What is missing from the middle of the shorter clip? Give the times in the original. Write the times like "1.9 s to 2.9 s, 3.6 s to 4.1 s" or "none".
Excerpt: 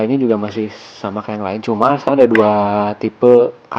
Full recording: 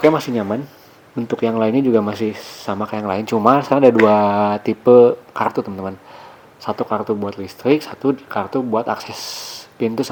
none